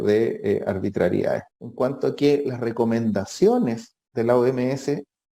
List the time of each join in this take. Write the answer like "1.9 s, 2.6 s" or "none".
1.5 s